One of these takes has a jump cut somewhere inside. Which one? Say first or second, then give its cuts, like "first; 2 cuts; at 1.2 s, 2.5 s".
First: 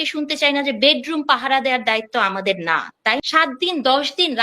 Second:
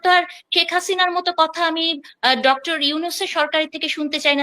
first; 1 cut; at 3.2 s